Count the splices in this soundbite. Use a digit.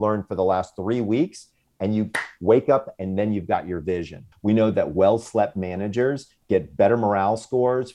2